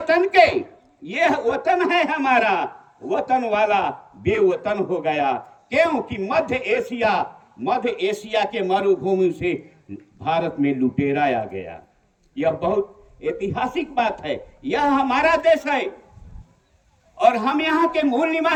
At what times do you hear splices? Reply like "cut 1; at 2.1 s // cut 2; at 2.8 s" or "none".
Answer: none